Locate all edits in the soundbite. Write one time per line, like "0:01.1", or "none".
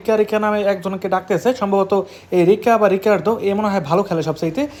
none